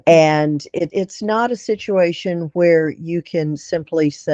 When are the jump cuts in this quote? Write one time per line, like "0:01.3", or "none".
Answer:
0:00.9